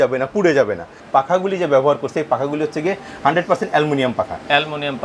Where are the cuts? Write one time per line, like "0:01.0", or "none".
0:01.0